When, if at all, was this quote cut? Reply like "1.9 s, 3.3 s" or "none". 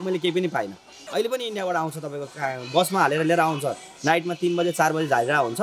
1.0 s